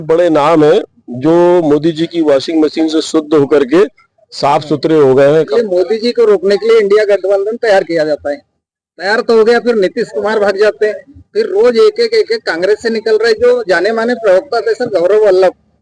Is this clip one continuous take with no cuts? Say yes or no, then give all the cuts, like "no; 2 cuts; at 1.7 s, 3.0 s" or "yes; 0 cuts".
no; 1 cut; at 5.5 s